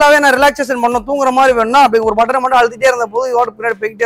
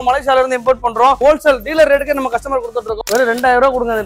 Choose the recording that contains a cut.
second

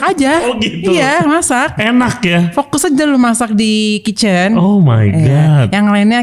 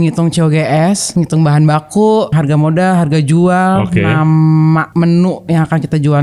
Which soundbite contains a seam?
second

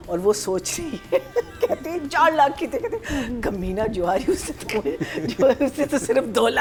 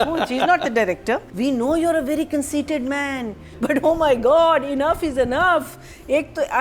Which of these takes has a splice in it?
second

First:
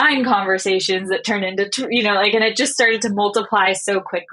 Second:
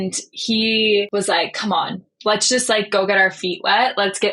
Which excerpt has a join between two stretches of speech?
second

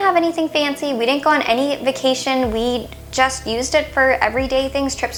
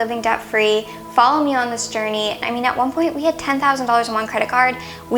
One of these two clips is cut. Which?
second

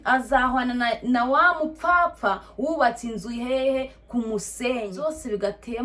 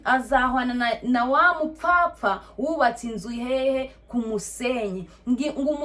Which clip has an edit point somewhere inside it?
first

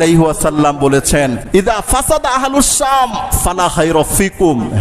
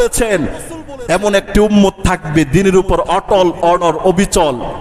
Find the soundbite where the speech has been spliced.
first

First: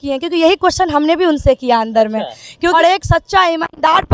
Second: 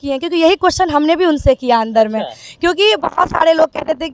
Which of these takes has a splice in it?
first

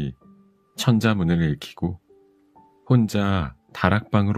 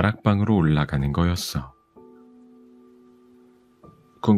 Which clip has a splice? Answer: second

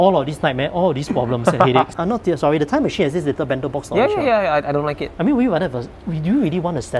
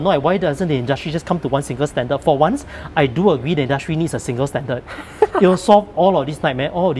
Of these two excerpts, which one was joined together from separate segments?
first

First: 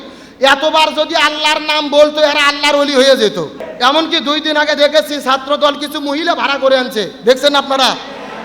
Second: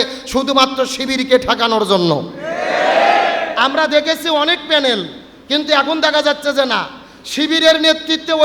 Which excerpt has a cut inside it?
first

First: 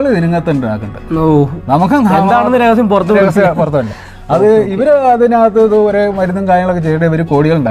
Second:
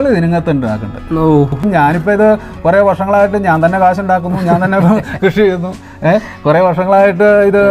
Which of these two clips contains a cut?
second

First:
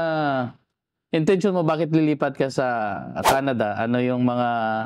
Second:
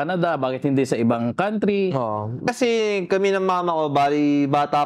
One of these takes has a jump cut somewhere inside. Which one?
second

